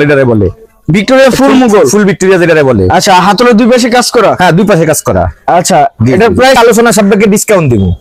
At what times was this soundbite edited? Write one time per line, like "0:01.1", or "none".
0:06.6

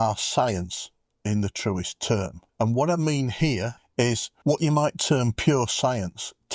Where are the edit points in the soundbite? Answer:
0:04.0

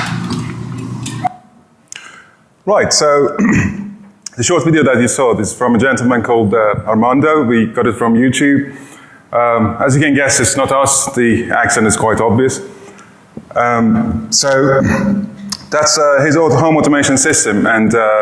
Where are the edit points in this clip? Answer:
none

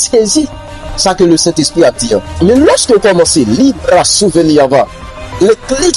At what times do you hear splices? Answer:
0:02.3

